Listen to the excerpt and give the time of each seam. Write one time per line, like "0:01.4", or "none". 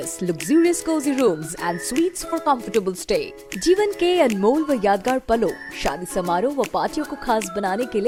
none